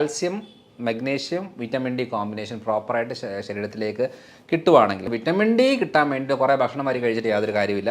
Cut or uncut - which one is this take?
cut